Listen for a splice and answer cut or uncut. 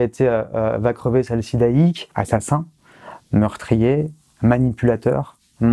cut